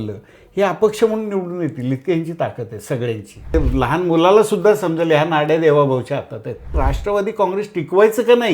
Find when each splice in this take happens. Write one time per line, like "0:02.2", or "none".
0:03.5
0:06.8